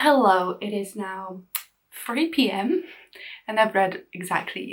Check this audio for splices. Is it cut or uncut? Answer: uncut